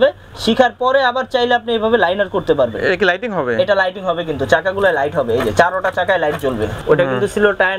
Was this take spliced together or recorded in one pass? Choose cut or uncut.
cut